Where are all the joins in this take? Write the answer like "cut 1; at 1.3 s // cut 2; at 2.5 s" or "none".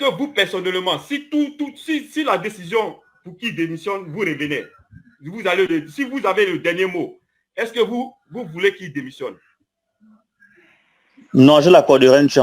none